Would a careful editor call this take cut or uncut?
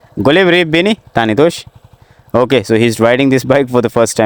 uncut